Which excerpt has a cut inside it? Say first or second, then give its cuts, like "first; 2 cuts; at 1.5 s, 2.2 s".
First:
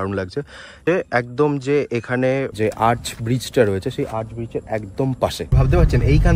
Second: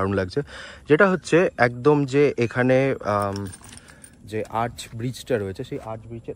first; 3 cuts; at 0.8 s, 2.5 s, 5.5 s